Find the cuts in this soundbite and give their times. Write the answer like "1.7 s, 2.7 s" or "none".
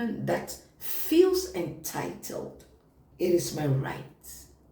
3.0 s